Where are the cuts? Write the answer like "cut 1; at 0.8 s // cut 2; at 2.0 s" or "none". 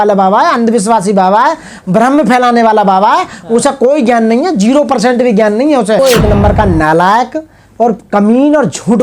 cut 1; at 6.0 s